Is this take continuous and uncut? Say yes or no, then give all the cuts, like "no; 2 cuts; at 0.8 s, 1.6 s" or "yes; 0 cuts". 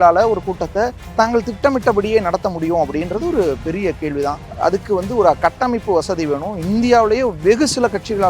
no; 2 cuts; at 1.0 s, 4.5 s